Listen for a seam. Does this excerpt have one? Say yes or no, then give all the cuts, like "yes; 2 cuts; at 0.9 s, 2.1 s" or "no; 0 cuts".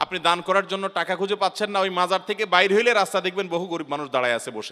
no; 0 cuts